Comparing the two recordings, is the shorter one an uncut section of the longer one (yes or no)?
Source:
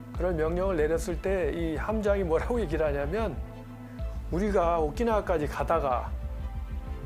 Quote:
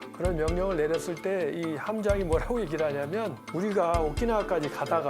no